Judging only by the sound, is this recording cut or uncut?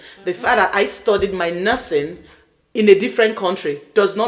uncut